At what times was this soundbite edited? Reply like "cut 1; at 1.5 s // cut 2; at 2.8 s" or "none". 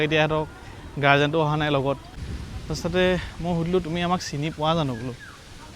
cut 1; at 2.1 s